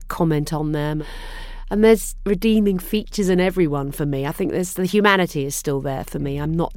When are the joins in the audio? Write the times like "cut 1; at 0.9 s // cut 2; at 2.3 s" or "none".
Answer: cut 1; at 1.0 s // cut 2; at 2.1 s